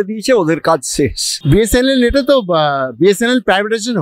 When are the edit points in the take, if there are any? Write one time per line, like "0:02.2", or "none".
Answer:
0:01.3